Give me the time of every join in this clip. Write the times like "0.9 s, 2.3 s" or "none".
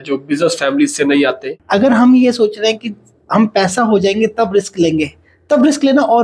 1.5 s